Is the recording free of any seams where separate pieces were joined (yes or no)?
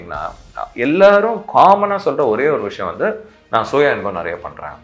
yes